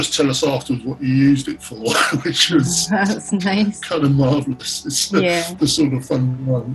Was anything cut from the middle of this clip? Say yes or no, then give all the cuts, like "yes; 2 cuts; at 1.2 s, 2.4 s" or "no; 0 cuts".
no; 0 cuts